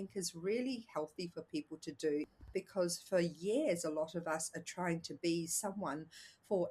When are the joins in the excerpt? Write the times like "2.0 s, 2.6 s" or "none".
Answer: 2.4 s